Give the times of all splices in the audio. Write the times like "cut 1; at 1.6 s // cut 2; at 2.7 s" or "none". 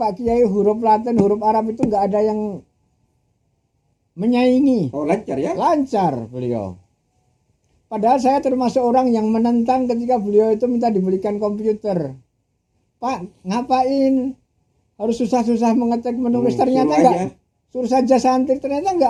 none